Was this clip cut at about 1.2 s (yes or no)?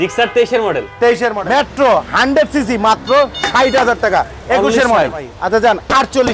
yes